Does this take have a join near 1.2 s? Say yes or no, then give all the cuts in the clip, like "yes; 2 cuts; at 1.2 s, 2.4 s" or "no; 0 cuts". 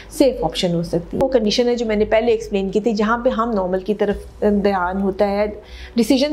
yes; 1 cut; at 1.2 s